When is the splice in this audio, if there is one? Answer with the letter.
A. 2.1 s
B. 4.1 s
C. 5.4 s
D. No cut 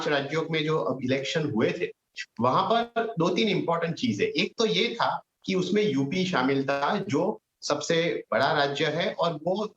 B